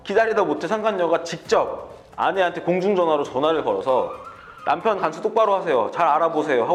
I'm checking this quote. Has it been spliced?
no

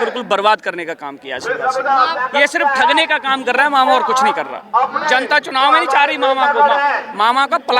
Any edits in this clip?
yes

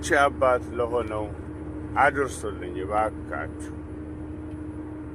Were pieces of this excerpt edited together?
no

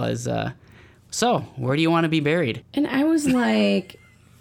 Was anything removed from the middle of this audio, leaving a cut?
yes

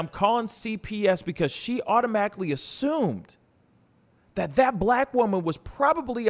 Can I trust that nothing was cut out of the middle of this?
yes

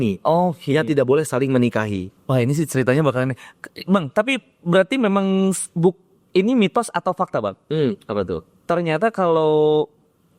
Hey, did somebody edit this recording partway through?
no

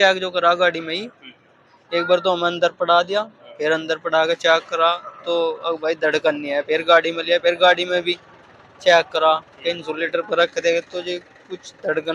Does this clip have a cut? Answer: no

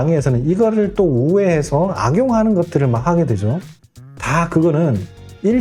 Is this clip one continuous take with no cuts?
yes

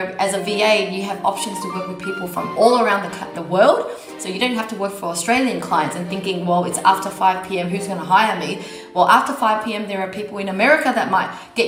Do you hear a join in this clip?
no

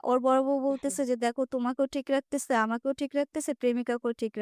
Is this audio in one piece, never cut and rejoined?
yes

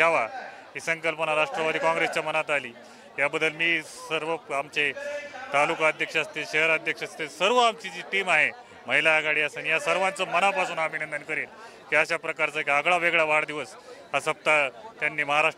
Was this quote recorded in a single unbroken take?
yes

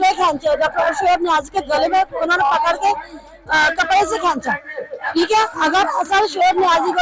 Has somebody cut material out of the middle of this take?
no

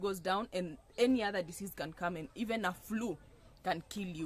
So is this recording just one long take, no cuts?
yes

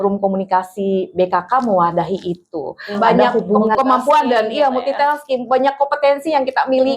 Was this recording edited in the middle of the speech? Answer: yes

